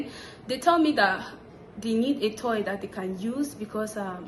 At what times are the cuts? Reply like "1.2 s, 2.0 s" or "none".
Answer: none